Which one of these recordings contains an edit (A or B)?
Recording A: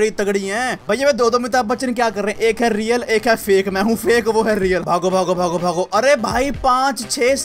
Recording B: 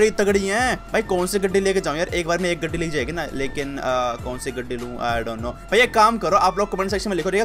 A